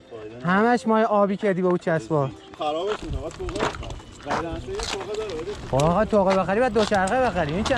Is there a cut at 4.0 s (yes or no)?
no